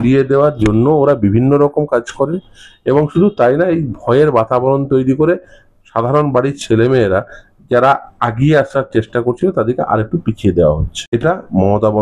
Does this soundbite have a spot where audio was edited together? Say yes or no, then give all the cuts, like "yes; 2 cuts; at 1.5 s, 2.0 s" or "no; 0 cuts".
yes; 1 cut; at 10.9 s